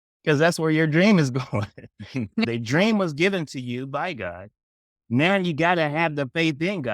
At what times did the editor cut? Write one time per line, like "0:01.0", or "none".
0:02.5